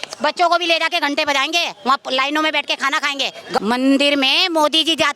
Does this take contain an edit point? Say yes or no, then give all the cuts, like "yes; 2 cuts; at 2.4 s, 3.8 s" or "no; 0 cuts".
yes; 1 cut; at 3.6 s